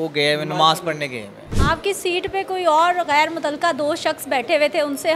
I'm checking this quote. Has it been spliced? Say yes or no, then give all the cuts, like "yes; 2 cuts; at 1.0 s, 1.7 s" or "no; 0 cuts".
yes; 1 cut; at 1.4 s